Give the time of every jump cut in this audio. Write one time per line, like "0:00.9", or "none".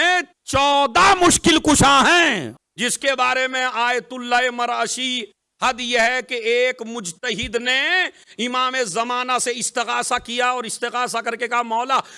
0:02.6